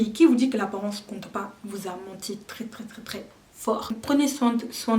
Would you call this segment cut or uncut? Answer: cut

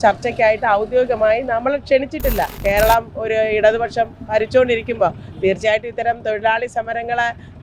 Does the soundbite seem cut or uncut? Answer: cut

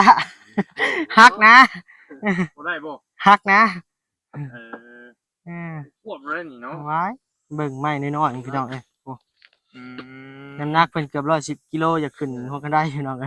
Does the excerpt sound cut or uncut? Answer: uncut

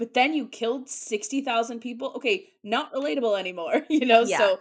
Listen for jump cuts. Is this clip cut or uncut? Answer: uncut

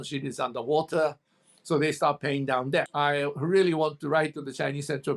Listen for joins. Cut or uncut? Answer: cut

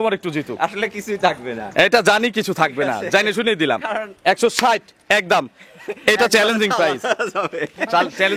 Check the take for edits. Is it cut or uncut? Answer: uncut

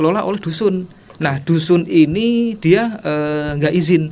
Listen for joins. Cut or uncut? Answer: uncut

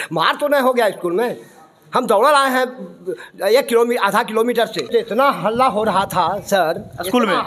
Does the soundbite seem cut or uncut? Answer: cut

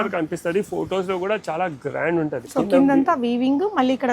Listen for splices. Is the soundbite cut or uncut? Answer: cut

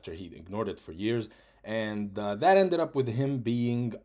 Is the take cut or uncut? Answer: uncut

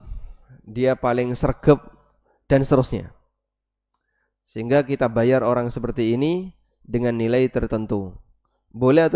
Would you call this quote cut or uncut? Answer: uncut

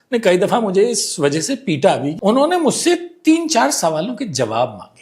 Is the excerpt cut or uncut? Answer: cut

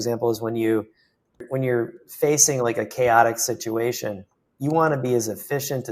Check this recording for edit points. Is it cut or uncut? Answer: cut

